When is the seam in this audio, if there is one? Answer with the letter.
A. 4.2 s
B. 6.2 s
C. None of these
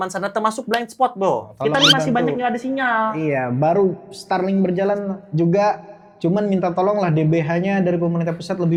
C